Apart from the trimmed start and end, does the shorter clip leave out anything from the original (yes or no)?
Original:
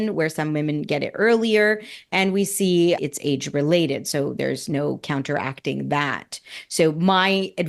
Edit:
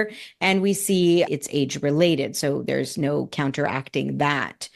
no